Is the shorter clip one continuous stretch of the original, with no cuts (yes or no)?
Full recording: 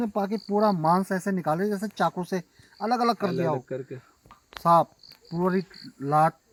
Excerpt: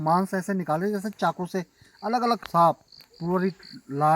no